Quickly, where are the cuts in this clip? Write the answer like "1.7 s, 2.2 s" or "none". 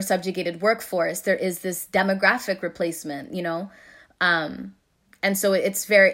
none